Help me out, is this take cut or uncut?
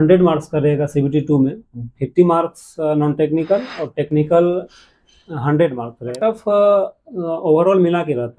cut